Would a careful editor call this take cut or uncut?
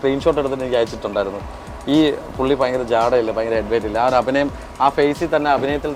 uncut